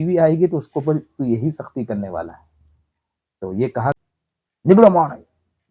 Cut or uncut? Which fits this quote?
cut